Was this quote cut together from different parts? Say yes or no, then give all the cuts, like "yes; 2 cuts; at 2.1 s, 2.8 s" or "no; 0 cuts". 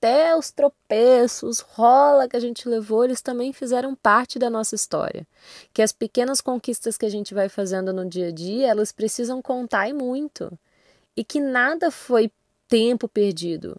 no; 0 cuts